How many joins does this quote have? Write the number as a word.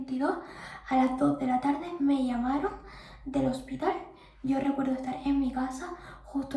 zero